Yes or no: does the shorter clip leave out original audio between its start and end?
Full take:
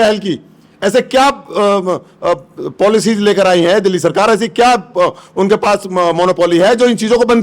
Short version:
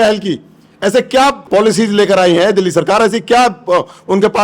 yes